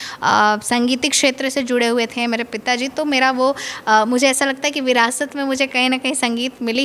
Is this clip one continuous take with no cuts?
yes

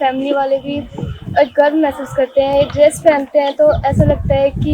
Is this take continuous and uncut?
yes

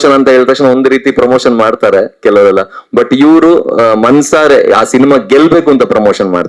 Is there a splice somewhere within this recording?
no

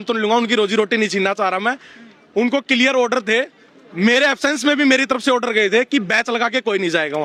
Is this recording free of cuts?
yes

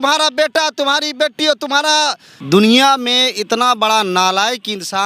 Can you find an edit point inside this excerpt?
yes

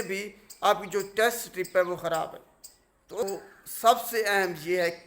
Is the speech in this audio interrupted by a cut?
yes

